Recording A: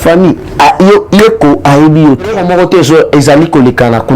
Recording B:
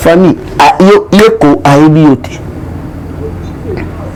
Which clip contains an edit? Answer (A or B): A